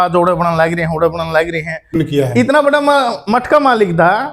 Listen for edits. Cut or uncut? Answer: cut